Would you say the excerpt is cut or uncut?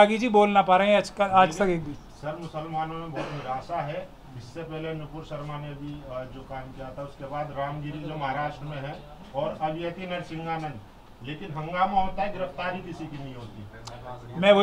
uncut